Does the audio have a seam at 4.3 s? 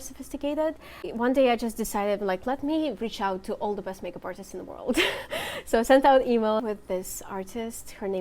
no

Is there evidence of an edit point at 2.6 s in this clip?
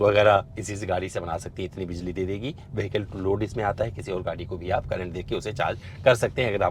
no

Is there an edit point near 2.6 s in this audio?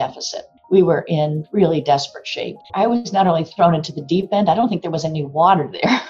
yes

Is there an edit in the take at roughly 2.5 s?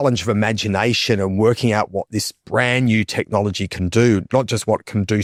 no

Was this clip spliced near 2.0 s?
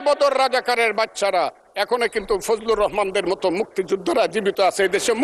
no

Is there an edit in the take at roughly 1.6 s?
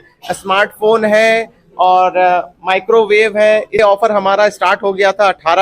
no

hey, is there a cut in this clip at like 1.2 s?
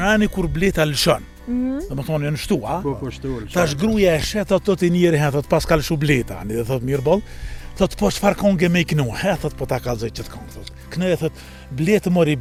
no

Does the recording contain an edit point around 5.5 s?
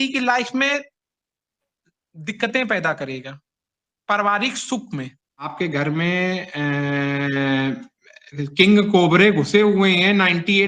yes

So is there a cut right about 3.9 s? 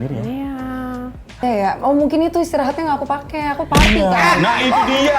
no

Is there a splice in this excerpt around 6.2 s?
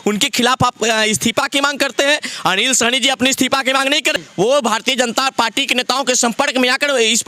no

